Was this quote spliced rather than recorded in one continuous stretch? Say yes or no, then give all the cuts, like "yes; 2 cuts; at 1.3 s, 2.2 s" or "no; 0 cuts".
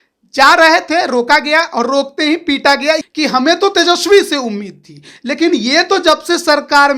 yes; 1 cut; at 3.1 s